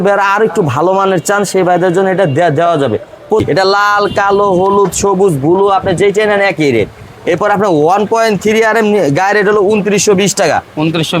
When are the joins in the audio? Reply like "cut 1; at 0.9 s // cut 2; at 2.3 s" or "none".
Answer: cut 1; at 3.4 s